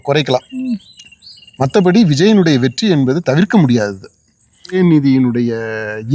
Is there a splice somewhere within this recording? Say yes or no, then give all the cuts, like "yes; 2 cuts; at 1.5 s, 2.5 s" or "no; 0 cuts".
yes; 1 cut; at 4.7 s